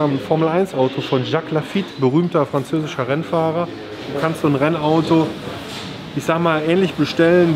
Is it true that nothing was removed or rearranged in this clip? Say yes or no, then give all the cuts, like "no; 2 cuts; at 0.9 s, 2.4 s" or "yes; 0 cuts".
no; 2 cuts; at 1.9 s, 4.1 s